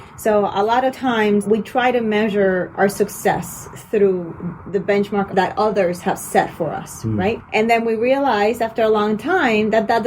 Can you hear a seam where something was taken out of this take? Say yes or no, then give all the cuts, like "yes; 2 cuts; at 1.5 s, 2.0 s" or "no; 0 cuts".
yes; 3 cuts; at 1.5 s, 5.3 s, 7.4 s